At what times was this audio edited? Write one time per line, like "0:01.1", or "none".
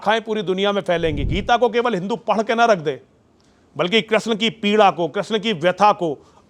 0:01.3

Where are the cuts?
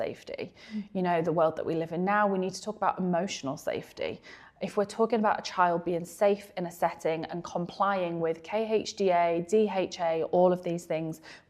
none

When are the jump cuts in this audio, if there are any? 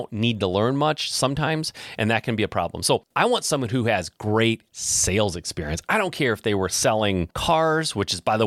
0:03.1
0:07.3

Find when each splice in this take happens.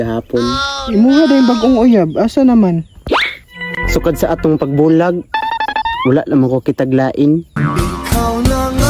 0:07.6

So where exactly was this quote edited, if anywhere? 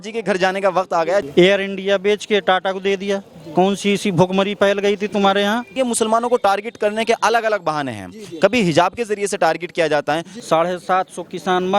0:01.3
0:05.7
0:10.3

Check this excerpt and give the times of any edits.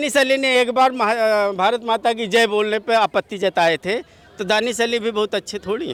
none

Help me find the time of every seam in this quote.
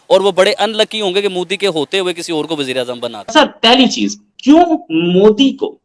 0:03.1

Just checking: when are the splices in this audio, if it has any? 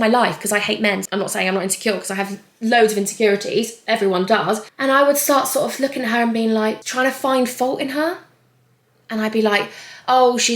0:01.0
0:04.7

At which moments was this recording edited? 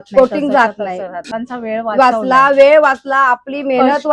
0:01.2

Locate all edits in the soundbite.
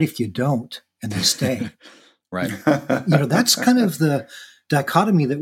0:03.1

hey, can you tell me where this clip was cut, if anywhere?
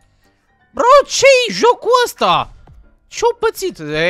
none

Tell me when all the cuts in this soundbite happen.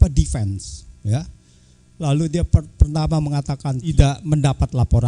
0:03.9

